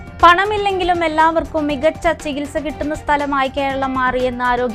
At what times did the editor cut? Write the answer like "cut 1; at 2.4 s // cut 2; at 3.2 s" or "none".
none